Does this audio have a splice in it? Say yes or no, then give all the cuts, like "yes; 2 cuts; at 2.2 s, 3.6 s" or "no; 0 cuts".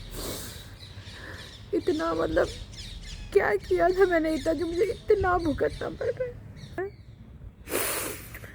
yes; 1 cut; at 6.8 s